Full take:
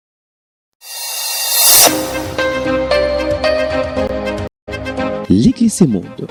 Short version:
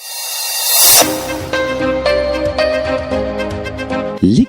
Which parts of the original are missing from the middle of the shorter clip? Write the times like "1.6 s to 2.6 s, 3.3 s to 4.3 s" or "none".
4.1 s to 4.3 s